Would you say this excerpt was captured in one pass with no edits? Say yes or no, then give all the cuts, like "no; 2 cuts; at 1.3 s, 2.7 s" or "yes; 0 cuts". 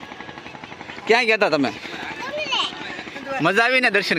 no; 1 cut; at 3.2 s